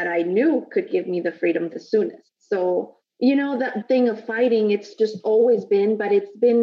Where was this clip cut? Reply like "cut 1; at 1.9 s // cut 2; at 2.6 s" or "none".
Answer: cut 1; at 4.9 s